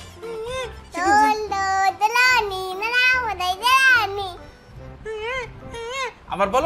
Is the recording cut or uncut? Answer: uncut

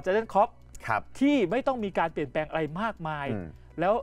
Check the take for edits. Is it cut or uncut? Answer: uncut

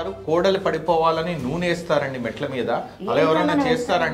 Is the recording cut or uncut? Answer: uncut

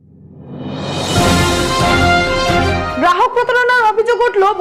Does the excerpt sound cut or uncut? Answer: cut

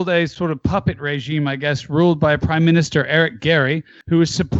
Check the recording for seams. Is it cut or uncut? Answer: uncut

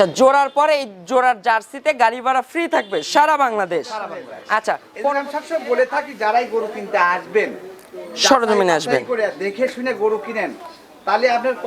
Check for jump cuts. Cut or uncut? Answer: cut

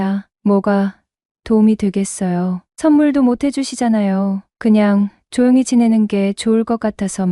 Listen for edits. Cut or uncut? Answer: uncut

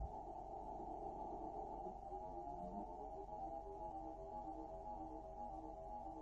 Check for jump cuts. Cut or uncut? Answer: uncut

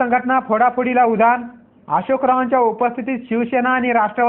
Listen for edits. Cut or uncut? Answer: uncut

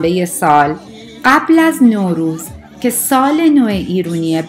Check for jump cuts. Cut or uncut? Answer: uncut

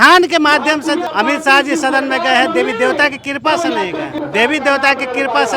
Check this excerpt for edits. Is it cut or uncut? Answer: cut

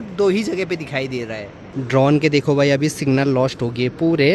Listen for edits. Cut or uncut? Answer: cut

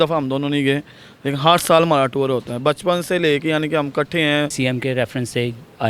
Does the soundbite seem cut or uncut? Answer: cut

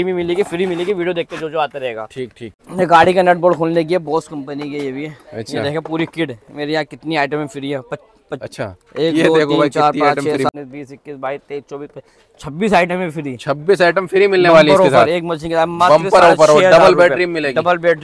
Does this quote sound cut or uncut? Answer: cut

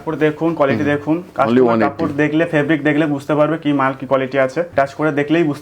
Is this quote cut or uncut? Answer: cut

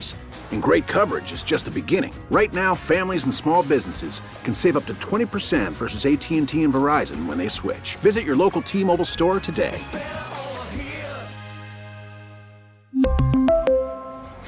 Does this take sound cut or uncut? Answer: uncut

